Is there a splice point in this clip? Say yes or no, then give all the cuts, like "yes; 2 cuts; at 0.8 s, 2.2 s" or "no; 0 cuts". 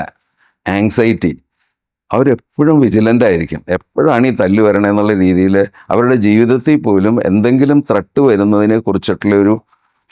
no; 0 cuts